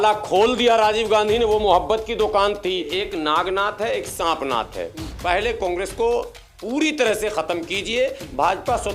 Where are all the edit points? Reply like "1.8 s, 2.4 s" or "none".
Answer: 2.9 s